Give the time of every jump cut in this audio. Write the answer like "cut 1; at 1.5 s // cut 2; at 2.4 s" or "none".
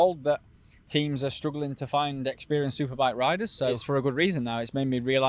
cut 1; at 3.8 s